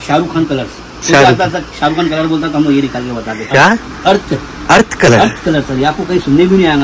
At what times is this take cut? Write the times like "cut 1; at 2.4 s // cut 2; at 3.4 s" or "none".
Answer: cut 1; at 3.4 s // cut 2; at 4.8 s